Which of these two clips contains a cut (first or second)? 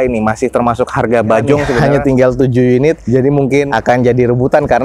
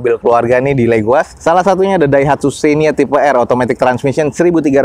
first